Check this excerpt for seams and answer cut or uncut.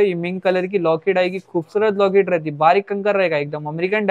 uncut